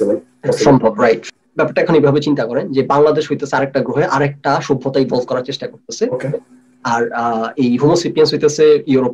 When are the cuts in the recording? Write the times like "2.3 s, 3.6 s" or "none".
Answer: 1.2 s